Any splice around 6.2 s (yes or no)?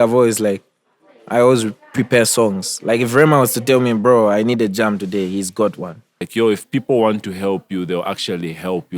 yes